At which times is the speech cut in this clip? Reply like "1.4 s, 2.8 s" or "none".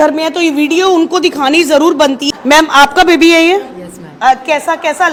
none